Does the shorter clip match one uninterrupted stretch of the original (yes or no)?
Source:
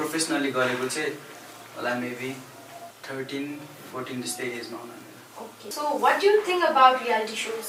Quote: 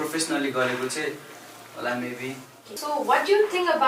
no